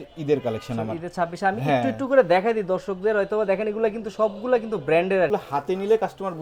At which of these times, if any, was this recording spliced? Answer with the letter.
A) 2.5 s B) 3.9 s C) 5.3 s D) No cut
C